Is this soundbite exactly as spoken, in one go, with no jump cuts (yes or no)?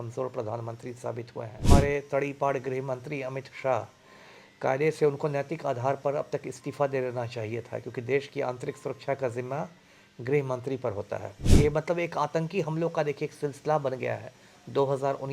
no